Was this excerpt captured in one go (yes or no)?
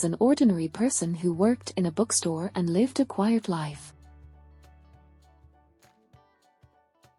yes